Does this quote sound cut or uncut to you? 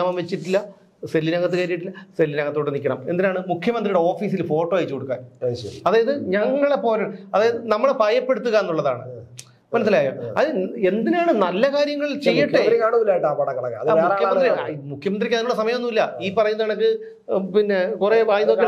uncut